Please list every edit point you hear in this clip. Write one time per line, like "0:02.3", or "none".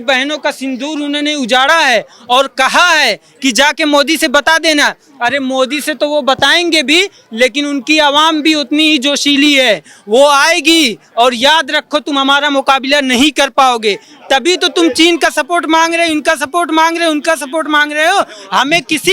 none